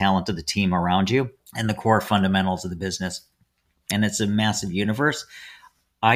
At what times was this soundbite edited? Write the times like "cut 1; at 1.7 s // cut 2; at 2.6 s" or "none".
cut 1; at 1.4 s // cut 2; at 3.9 s

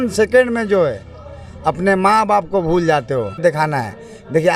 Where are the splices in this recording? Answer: cut 1; at 3.4 s

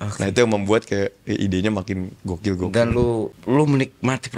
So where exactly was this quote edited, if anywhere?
cut 1; at 3.3 s

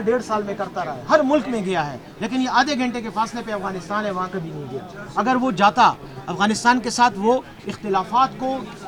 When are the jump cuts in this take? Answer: none

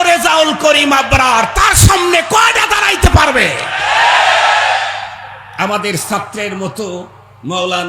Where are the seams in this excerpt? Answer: none

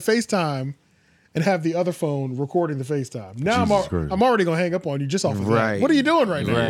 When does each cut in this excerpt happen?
none

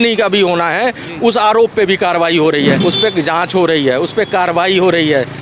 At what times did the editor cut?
cut 1; at 2.8 s

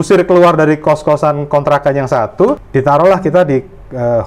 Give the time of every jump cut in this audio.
cut 1; at 2.6 s

